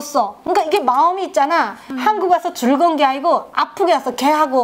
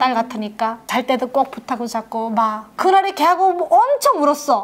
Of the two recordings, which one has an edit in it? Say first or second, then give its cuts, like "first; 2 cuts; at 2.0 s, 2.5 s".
second; 1 cut; at 2.6 s